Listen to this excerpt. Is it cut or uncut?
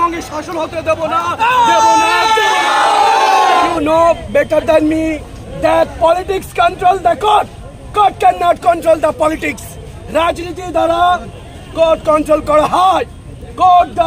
cut